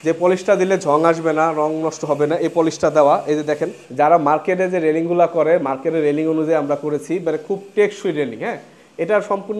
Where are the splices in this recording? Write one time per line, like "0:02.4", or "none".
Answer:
0:03.8